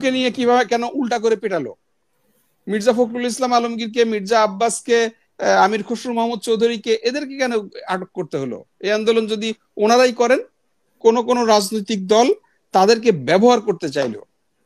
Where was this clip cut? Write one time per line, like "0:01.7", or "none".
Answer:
0:11.0